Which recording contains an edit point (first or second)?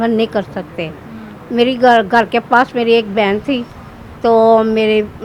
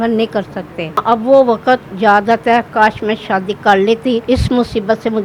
second